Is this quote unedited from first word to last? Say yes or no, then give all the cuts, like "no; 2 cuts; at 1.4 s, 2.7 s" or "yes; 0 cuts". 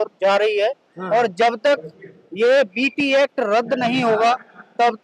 yes; 0 cuts